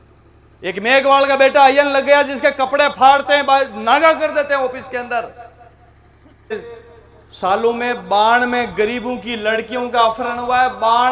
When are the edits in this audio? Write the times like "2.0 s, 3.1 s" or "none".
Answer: 6.5 s